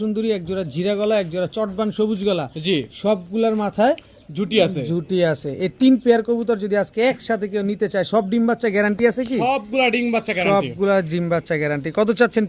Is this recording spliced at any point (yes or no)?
no